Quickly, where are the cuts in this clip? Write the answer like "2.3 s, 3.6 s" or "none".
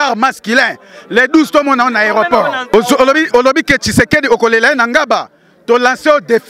2.7 s